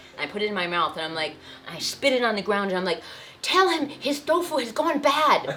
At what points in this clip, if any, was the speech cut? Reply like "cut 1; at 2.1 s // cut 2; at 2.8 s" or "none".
none